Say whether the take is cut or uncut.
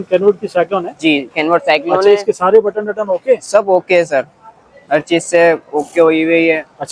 uncut